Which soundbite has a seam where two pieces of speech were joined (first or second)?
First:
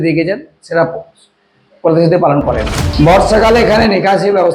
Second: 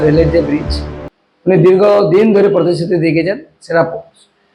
first